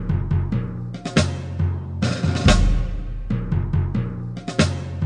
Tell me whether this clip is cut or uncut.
uncut